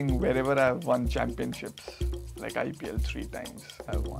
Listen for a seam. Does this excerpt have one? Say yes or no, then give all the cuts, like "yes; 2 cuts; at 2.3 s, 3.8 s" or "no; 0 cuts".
no; 0 cuts